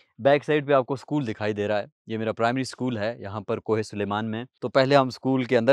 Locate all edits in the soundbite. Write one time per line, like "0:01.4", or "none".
0:04.4